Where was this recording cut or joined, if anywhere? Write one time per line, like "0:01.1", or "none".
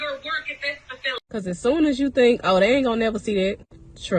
0:01.1